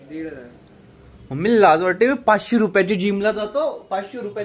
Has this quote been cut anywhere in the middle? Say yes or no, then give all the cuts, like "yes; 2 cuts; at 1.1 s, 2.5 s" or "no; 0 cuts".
no; 0 cuts